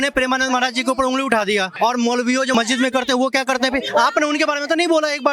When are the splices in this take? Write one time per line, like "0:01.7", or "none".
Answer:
0:01.7
0:02.5